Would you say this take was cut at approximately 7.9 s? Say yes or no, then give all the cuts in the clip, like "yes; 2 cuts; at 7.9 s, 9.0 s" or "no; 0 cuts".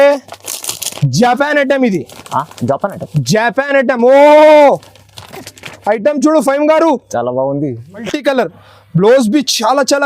yes; 1 cut; at 7.9 s